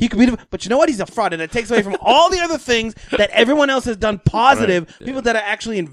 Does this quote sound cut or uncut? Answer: cut